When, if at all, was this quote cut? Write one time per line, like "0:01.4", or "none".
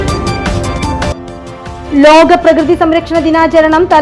0:01.0